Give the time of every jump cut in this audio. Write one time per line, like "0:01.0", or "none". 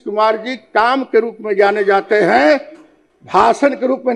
none